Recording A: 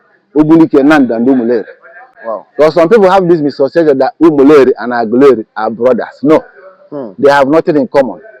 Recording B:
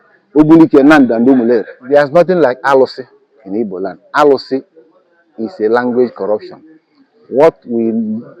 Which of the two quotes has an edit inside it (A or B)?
B